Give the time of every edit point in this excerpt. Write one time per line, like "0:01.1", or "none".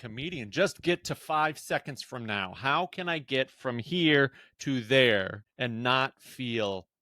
0:05.4